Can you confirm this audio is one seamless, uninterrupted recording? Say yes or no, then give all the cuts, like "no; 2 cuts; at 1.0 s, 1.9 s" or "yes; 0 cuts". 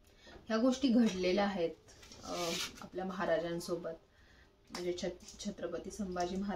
yes; 0 cuts